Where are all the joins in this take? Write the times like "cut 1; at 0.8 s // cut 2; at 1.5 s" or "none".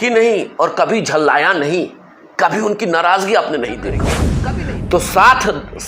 cut 1; at 4.3 s